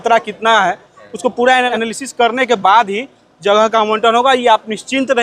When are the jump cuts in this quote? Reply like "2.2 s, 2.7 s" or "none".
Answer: 1.7 s